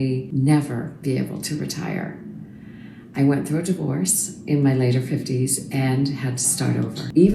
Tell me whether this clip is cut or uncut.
uncut